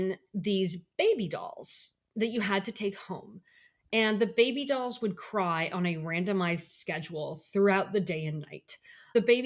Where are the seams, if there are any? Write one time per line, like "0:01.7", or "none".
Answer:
none